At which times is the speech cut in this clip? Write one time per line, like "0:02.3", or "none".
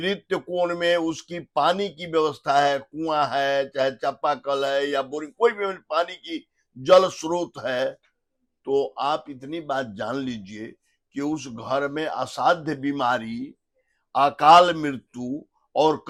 none